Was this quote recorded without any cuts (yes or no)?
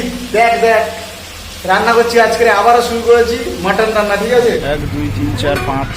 no